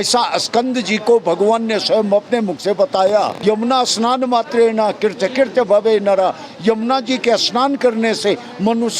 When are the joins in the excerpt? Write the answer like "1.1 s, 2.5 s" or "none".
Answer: 3.3 s